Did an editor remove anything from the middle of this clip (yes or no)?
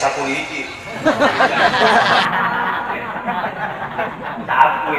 yes